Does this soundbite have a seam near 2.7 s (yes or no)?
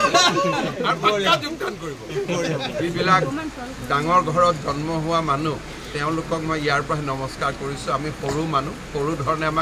yes